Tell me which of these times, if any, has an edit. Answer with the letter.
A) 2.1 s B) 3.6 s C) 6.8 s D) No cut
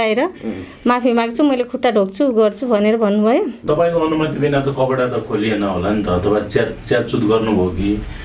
B